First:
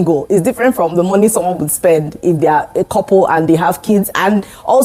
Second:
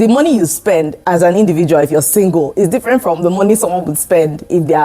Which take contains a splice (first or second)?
second